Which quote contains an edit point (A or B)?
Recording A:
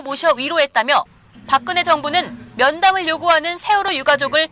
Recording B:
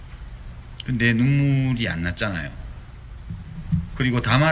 A